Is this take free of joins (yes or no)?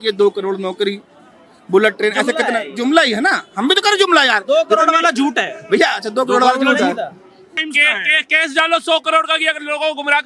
no